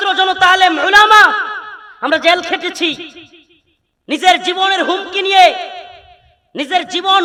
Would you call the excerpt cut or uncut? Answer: uncut